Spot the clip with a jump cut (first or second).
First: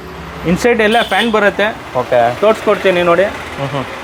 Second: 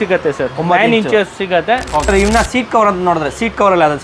second